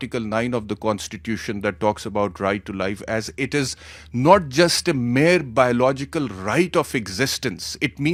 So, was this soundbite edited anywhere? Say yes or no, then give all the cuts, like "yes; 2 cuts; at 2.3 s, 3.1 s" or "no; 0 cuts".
no; 0 cuts